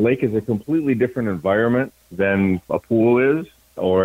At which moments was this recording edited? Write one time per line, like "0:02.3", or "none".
none